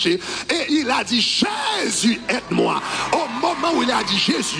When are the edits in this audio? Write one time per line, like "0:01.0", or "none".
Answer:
none